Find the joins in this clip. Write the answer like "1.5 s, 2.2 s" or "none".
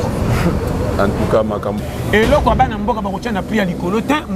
1.8 s